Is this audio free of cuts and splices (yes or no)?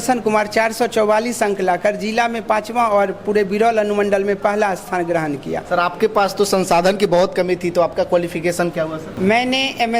no